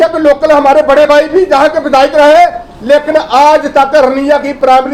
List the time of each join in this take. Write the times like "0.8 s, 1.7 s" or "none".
none